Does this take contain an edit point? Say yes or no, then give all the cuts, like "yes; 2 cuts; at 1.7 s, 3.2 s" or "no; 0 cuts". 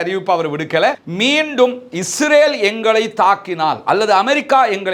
yes; 1 cut; at 1.1 s